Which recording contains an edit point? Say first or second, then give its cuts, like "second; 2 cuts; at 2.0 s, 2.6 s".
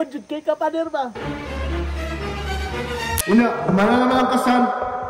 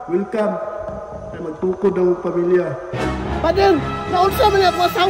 first; 1 cut; at 3.1 s